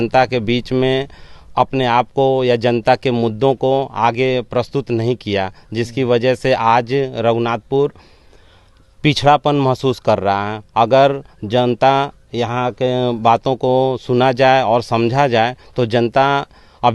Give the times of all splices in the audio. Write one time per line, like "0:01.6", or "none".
none